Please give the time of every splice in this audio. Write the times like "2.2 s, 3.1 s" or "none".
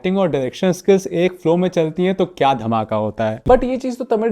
3.4 s